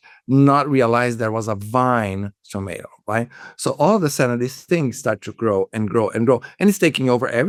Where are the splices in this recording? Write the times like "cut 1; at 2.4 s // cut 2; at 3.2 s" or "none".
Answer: none